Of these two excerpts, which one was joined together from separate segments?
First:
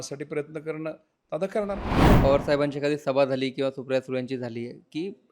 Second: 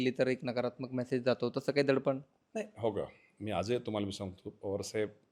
first; 1 cut; at 2.1 s

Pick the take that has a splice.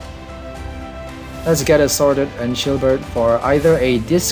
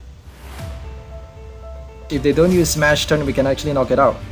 second; 1 cut; at 2.0 s

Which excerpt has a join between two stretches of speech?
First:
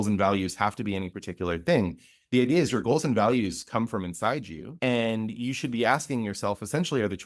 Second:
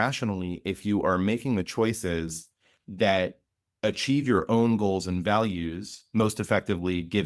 first; 1 cut; at 4.7 s

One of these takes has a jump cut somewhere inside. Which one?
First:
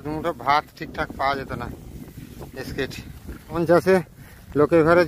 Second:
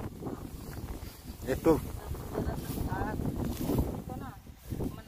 first; 1 cut; at 3.6 s

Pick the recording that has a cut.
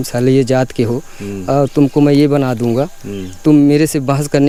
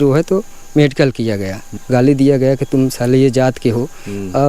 second; 1 cut; at 1.8 s

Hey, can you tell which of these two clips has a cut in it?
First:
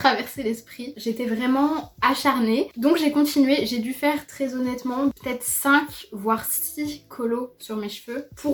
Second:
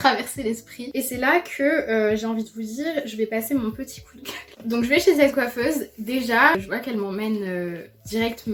second; 2 cuts; at 1.0 s, 4.4 s

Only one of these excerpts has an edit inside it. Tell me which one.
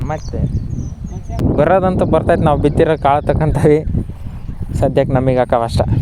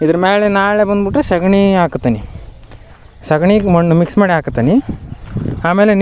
first; 1 cut; at 1.4 s

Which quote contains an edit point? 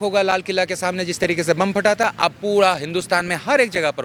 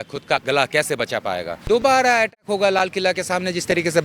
second; 1 cut; at 1.6 s

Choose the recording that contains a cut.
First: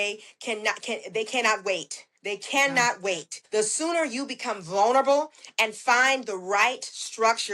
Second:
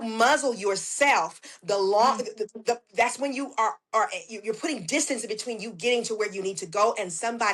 first; 1 cut; at 3.3 s

